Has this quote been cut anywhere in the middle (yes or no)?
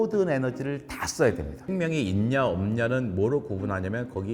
yes